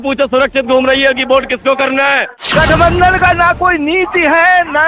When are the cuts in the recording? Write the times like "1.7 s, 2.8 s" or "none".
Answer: 2.4 s